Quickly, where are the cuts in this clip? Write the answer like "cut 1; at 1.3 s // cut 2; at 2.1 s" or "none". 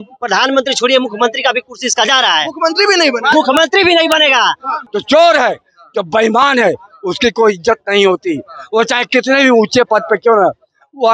cut 1; at 4.8 s